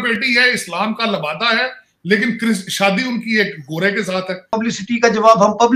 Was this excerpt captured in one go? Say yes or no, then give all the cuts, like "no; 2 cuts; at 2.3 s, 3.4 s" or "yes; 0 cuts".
no; 1 cut; at 4.5 s